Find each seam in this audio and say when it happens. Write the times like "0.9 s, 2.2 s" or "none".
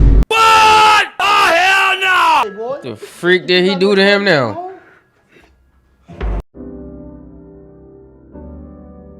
2.5 s